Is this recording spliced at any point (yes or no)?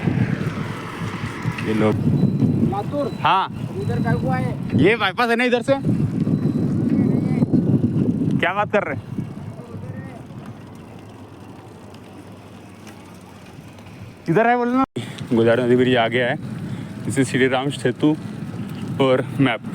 yes